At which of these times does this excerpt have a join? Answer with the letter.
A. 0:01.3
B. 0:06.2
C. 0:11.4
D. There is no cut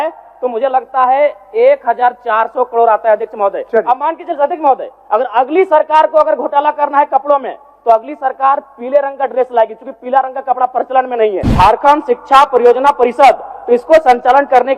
C